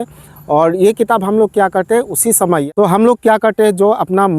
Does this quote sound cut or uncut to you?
cut